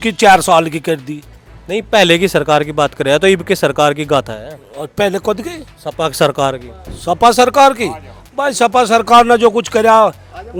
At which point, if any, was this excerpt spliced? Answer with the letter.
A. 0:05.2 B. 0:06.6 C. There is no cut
C